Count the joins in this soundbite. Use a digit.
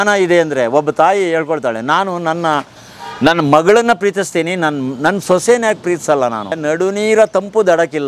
1